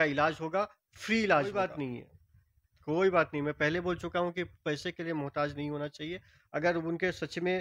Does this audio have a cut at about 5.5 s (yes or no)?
no